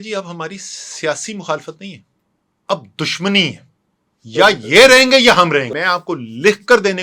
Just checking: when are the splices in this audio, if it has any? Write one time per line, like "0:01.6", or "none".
0:05.7